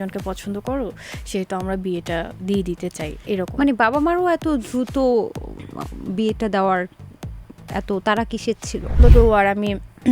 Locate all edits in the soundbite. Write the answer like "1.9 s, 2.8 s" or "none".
9.0 s